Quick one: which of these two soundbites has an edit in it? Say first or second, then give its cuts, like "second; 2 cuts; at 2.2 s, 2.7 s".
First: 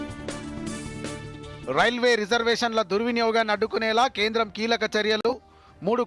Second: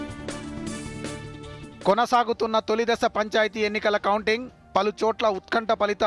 first; 1 cut; at 1.1 s